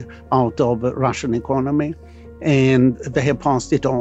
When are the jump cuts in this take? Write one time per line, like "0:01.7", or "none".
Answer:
0:03.0